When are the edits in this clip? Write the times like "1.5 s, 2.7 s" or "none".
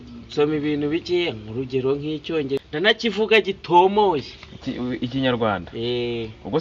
2.6 s